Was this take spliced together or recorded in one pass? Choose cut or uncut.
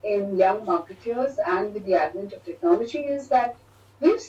uncut